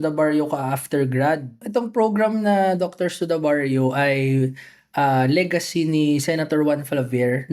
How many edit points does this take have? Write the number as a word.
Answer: one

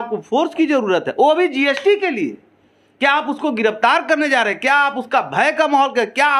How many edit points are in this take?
zero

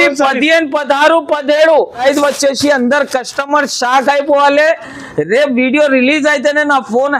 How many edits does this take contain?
one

